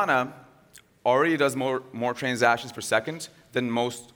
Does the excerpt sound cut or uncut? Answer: uncut